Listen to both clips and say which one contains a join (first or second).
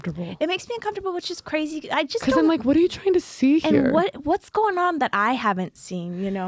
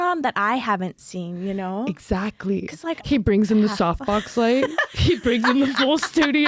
second